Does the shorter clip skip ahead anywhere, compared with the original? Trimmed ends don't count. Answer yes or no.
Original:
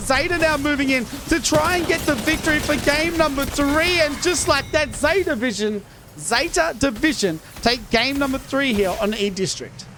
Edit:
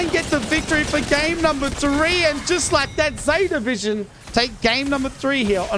yes